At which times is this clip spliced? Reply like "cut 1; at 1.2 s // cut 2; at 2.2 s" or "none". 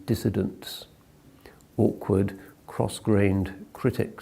cut 1; at 1.4 s